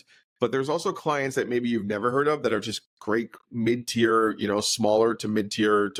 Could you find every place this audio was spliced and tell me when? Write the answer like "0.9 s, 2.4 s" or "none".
none